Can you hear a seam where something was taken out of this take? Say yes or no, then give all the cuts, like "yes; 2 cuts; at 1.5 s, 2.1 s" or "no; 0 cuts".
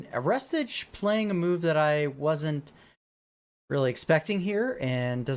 no; 0 cuts